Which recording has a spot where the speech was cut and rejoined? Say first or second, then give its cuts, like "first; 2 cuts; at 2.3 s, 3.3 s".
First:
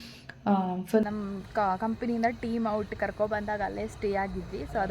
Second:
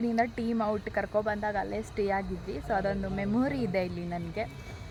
first; 1 cut; at 0.9 s